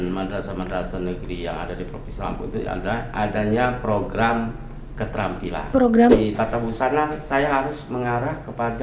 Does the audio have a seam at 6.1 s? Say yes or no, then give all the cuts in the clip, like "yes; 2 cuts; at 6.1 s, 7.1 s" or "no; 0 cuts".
yes; 1 cut; at 6.1 s